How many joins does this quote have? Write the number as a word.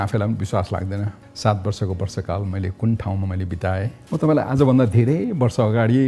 two